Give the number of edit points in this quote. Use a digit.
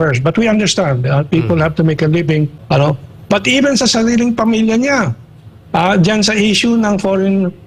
1